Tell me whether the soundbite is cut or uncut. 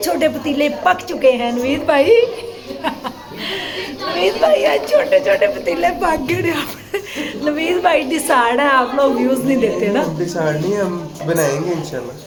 uncut